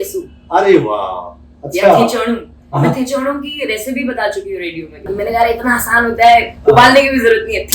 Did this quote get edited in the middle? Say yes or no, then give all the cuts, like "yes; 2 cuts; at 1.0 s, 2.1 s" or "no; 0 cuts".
yes; 1 cut; at 5.1 s